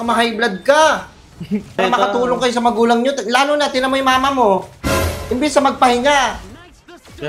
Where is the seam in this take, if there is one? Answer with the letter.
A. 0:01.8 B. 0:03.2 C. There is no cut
A